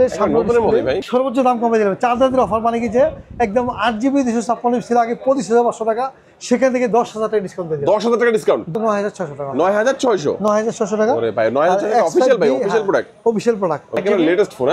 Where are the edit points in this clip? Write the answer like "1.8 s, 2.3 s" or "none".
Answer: 1.1 s, 8.7 s, 14.0 s